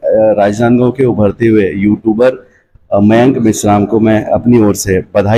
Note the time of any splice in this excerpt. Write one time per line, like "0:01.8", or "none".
none